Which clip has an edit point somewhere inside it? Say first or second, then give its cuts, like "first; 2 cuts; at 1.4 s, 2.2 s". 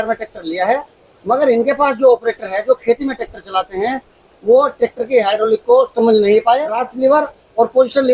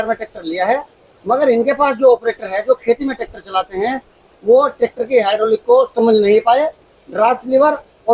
first; 1 cut; at 6.8 s